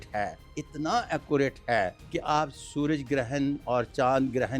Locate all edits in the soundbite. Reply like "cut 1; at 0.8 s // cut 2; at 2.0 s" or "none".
cut 1; at 2.0 s